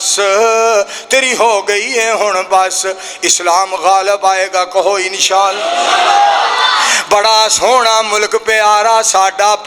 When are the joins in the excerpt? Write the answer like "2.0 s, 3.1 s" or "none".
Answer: none